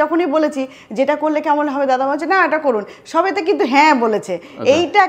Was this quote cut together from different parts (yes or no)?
no